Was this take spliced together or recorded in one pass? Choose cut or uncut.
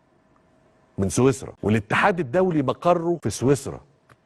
cut